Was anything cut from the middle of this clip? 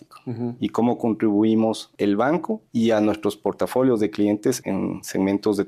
yes; 3 cuts; at 1.9 s, 2.6 s, 4.6 s

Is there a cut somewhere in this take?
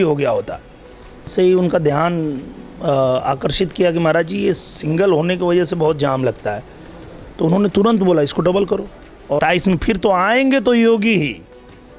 yes; 2 cuts; at 1.3 s, 9.4 s

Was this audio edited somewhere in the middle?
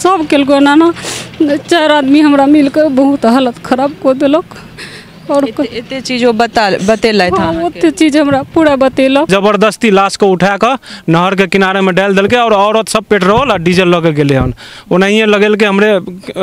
yes; 1 cut; at 9.3 s

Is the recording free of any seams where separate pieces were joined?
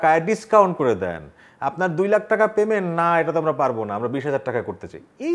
yes; 0 cuts

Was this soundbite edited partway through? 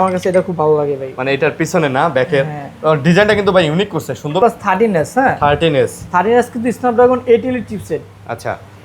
yes; 1 cut; at 4.4 s

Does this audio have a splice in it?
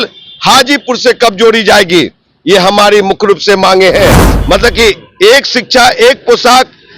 yes; 1 cut; at 4.3 s

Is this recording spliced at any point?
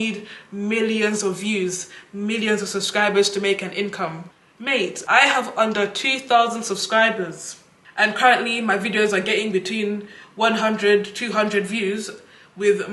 no; 0 cuts

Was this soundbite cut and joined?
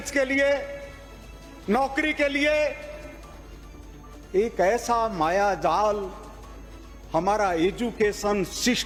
no; 0 cuts

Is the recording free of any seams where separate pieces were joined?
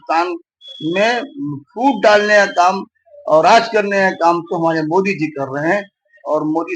yes; 0 cuts

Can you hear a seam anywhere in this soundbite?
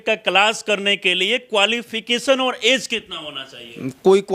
no; 0 cuts

